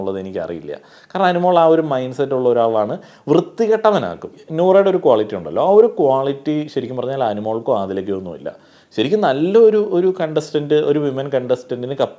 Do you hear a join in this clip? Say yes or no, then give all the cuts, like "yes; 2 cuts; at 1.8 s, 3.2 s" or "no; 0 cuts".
yes; 1 cut; at 4.3 s